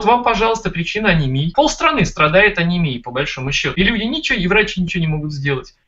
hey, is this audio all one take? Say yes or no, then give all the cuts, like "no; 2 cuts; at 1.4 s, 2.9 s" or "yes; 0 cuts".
no; 1 cut; at 3.6 s